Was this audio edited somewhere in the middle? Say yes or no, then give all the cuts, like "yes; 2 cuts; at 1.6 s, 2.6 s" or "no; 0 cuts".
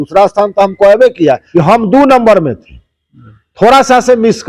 yes; 1 cut; at 1.4 s